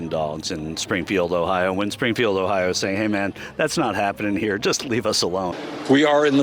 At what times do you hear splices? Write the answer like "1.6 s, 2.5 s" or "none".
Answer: 5.5 s